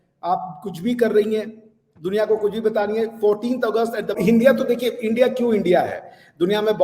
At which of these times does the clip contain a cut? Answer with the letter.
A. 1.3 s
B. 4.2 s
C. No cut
B